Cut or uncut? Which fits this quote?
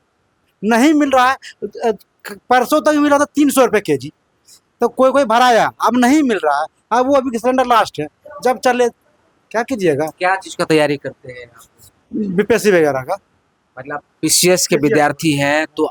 uncut